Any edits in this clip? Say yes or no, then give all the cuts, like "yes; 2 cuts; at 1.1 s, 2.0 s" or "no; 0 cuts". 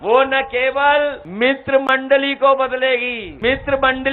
yes; 2 cuts; at 1.2 s, 3.2 s